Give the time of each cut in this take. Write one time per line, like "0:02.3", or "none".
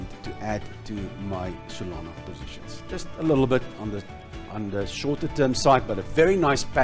none